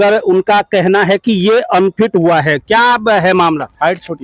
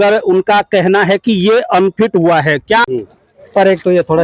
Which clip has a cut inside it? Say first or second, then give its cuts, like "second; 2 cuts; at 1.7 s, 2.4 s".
second; 1 cut; at 2.8 s